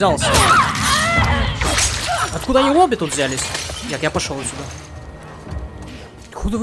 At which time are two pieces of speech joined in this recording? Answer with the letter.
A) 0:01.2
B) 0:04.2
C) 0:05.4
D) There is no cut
D